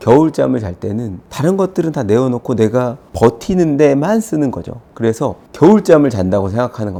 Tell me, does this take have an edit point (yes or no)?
no